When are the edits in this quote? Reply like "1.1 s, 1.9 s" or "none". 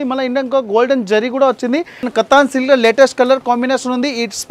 2.1 s